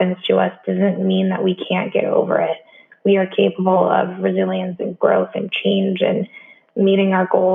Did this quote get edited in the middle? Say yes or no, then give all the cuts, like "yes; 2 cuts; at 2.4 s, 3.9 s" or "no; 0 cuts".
no; 0 cuts